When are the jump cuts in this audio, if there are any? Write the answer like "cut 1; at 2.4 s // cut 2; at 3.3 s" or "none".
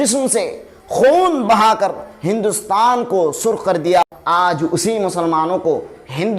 cut 1; at 4.1 s